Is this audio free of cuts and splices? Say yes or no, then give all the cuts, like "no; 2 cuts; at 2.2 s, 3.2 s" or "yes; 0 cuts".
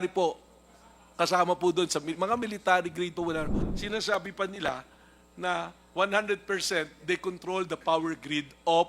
no; 1 cut; at 3.7 s